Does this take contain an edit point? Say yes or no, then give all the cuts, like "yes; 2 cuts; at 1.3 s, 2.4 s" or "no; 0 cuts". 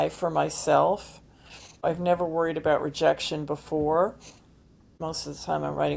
yes; 2 cuts; at 1.8 s, 4.9 s